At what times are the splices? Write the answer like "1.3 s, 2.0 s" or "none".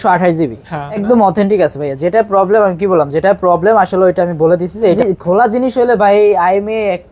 1.0 s, 5.0 s